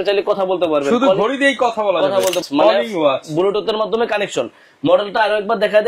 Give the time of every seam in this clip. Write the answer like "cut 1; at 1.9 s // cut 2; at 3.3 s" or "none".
cut 1; at 2.4 s